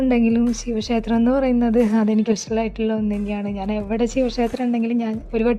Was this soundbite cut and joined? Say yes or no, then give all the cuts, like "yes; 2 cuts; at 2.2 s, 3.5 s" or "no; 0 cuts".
no; 0 cuts